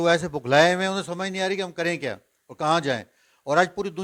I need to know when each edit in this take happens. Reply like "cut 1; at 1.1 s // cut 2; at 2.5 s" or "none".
none